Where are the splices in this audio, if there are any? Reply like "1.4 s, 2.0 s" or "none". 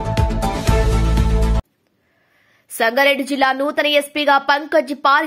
1.7 s